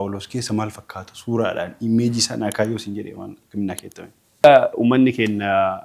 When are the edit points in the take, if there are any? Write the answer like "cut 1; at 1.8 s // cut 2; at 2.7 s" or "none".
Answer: cut 1; at 4.2 s